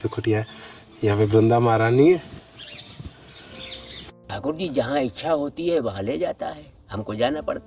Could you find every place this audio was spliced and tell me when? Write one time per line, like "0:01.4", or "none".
0:04.3